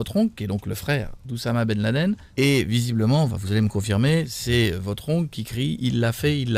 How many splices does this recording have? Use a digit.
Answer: 1